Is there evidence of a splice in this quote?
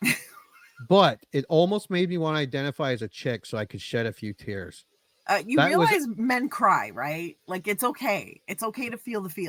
no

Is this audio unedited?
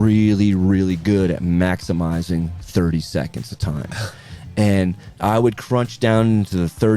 no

